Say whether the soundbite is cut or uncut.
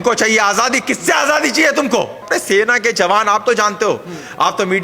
cut